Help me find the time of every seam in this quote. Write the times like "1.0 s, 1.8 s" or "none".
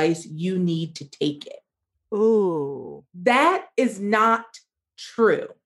none